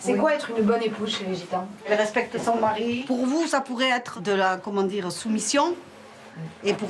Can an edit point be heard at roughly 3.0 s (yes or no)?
yes